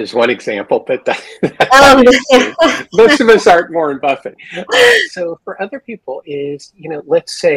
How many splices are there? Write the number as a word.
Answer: zero